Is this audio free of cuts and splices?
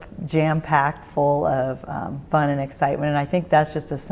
yes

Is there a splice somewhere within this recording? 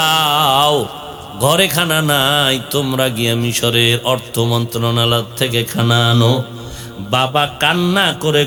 no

